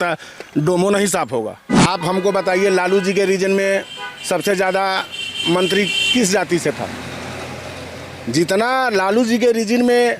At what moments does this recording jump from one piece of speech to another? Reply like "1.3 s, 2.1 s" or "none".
1.6 s